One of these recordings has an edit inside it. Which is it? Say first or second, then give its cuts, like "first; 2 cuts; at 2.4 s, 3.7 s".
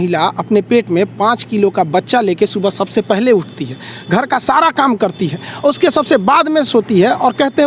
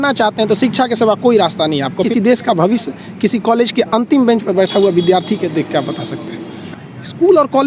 second; 2 cuts; at 2.1 s, 6.6 s